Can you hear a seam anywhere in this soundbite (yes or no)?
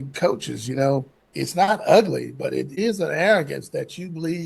yes